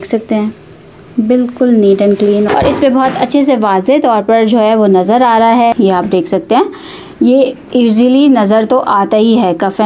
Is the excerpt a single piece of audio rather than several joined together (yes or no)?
no